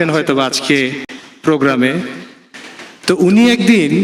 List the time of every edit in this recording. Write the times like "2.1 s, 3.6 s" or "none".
none